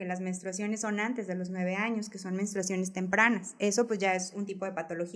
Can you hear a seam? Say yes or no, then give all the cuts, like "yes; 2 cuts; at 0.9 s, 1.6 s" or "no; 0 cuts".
no; 0 cuts